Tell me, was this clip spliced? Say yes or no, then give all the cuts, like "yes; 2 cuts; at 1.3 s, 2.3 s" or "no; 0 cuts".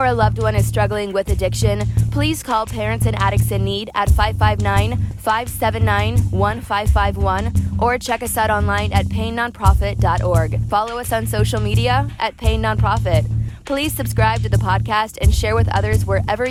no; 0 cuts